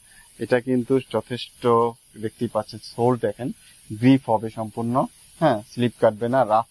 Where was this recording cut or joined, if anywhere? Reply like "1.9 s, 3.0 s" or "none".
none